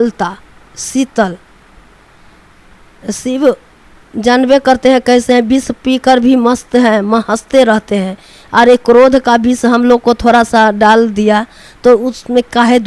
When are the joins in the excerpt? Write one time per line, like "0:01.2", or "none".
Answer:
none

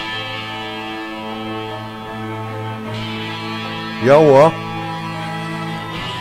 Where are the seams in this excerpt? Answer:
none

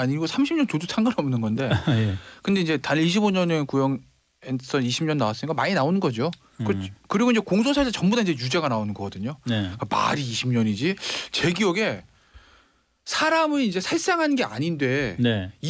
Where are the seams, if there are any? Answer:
0:03.9

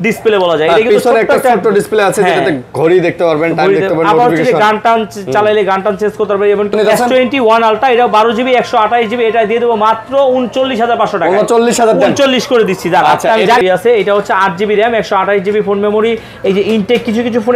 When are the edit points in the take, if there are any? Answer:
0:06.7
0:13.6

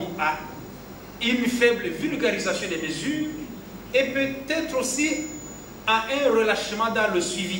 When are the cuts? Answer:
none

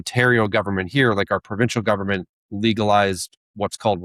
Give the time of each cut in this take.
none

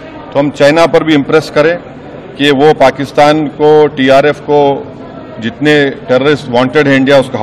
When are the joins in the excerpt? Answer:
none

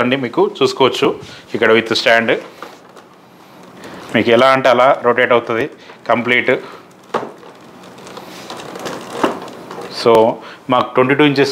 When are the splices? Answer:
none

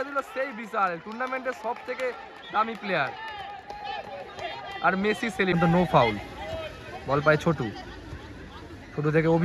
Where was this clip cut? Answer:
0:05.5

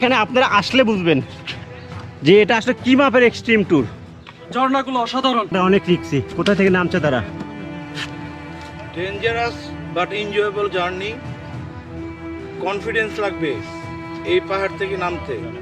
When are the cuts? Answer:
0:05.5

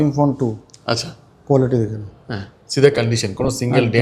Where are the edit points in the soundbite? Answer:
none

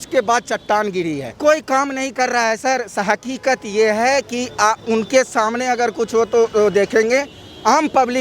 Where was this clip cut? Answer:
0:01.3

